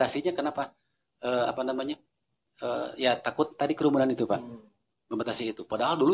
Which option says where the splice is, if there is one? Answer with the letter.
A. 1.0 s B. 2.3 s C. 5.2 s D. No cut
D